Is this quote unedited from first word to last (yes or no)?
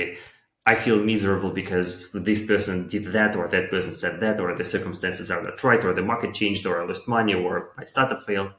yes